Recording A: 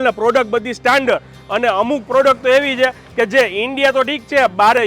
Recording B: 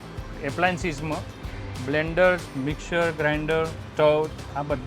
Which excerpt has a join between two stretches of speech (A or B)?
B